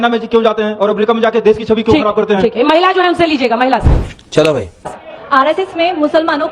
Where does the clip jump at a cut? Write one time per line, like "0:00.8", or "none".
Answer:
none